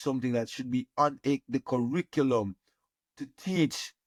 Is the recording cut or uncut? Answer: uncut